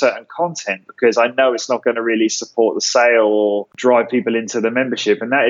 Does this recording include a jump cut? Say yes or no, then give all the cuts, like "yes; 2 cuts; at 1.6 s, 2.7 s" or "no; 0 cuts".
yes; 1 cut; at 3.7 s